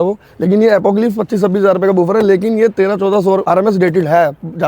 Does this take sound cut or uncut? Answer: cut